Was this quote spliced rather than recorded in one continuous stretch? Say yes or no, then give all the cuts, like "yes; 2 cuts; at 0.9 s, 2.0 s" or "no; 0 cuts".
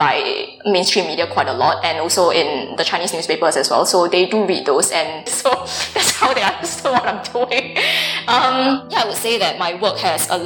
yes; 2 cuts; at 5.3 s, 8.9 s